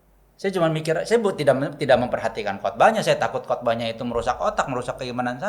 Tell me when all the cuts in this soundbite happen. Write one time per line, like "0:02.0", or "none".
none